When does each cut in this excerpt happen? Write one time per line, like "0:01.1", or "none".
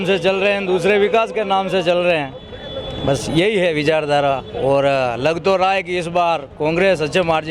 none